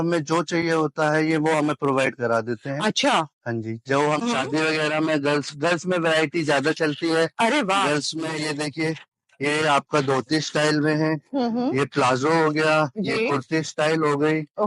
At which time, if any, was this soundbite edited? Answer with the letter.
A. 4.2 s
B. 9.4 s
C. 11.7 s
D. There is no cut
A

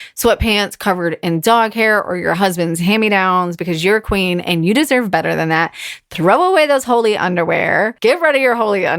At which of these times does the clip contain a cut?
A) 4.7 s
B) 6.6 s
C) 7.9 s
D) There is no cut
C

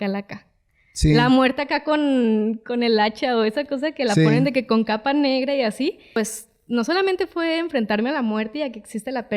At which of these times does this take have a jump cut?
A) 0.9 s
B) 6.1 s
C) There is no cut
B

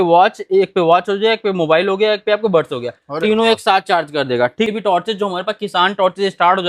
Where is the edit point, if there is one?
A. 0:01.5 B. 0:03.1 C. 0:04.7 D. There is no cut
C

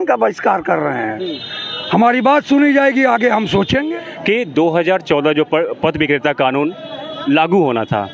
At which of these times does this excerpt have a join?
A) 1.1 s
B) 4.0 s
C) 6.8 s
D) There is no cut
B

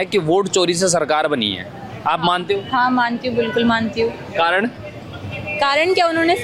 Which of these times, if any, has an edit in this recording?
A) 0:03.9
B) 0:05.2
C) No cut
C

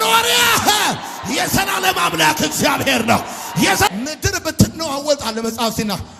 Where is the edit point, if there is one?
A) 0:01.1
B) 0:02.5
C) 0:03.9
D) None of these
C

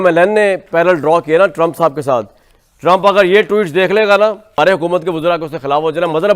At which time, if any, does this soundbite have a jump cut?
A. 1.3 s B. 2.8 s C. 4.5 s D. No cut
C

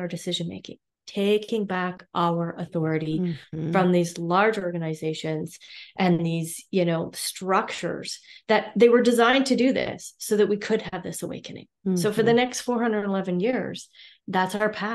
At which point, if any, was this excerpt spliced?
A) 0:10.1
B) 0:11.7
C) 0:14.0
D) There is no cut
D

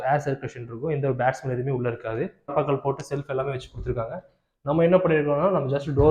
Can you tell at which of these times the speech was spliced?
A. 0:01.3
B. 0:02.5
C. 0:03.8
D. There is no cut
B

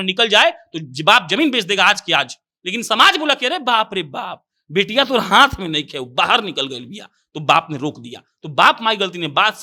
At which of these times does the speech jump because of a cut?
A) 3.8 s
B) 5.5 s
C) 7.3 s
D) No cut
D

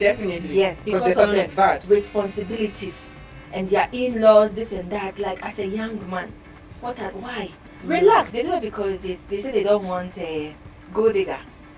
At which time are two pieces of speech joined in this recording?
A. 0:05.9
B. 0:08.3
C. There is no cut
B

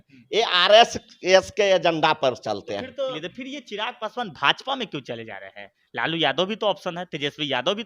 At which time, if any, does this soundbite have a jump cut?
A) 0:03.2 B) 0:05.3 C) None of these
A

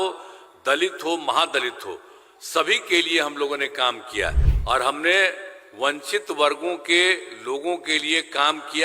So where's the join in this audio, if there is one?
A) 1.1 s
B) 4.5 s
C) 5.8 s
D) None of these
B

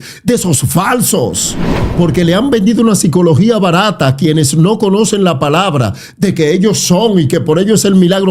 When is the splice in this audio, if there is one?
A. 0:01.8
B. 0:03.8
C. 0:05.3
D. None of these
A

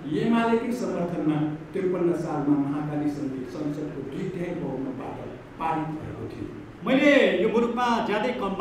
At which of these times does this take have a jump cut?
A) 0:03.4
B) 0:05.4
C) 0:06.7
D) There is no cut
C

